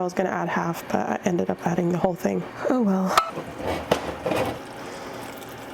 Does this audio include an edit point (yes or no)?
no